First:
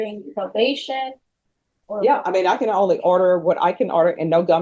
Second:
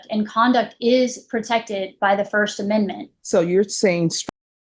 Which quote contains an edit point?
second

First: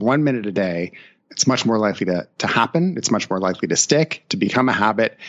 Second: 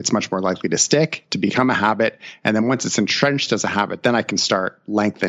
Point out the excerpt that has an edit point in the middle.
first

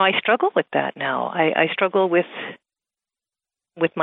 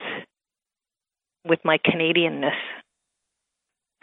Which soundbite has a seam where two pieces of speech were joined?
second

